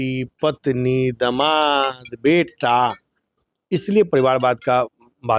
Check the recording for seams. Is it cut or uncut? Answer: uncut